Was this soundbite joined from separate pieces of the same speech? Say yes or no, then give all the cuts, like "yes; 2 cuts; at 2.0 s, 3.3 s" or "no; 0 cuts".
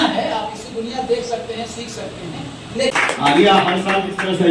yes; 1 cut; at 2.9 s